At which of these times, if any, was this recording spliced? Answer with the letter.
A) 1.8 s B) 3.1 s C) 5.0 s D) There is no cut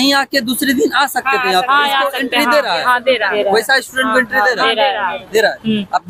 D